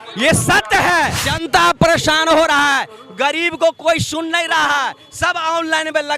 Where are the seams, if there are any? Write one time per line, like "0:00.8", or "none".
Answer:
0:01.3